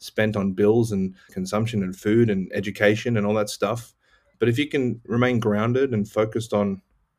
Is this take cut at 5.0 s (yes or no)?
no